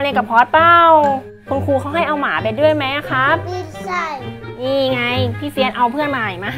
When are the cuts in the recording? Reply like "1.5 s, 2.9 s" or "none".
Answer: 4.3 s